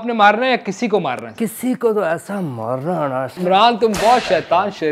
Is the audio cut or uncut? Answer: cut